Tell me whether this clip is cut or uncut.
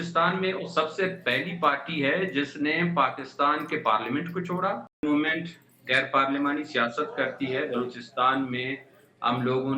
cut